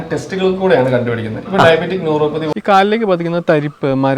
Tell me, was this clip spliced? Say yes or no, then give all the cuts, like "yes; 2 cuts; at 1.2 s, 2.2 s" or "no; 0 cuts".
yes; 1 cut; at 2.5 s